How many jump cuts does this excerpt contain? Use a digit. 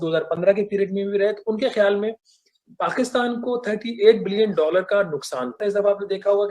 1